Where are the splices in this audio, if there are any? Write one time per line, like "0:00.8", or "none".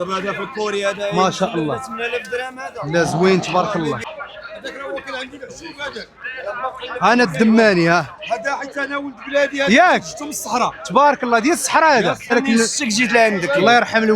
0:04.0
0:12.3